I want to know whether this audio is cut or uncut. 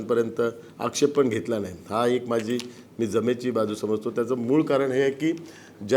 uncut